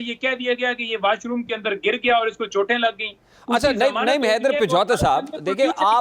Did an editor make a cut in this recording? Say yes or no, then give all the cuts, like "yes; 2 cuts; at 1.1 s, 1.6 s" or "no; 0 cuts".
no; 0 cuts